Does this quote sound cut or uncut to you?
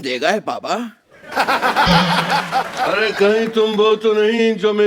uncut